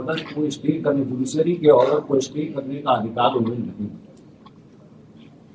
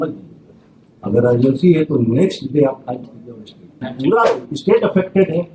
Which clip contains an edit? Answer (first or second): second